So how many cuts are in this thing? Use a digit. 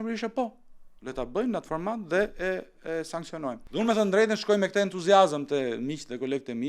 1